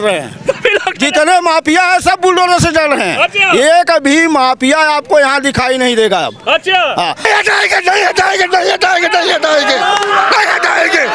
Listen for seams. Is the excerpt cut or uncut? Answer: cut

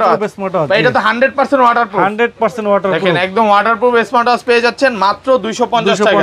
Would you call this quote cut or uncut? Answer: uncut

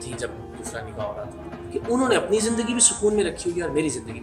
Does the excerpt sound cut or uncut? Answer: cut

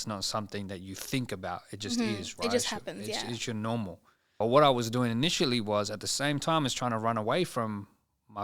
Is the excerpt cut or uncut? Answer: cut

